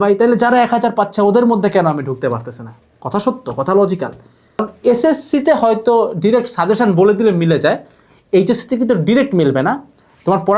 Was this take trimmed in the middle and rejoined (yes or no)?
yes